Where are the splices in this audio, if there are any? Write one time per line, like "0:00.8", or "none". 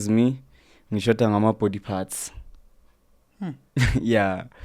none

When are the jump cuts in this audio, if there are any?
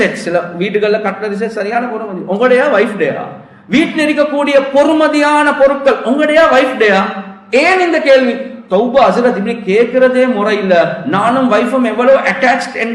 none

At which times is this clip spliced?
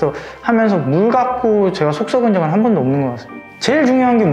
0:03.2

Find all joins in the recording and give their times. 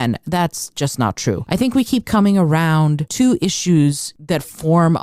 0:01.4
0:03.0
0:04.1

